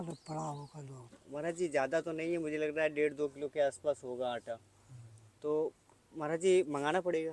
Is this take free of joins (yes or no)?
yes